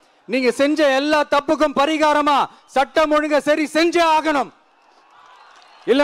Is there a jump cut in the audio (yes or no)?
no